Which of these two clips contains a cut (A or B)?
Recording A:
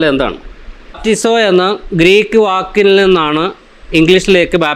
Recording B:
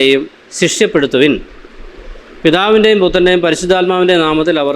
A